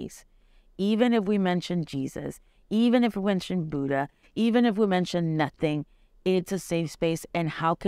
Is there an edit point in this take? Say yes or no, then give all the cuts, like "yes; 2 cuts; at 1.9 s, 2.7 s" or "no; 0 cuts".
no; 0 cuts